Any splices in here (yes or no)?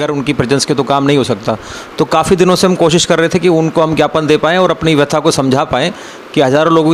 no